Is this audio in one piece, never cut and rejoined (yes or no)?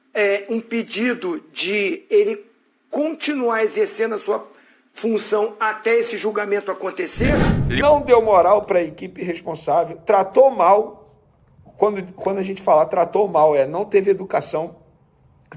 no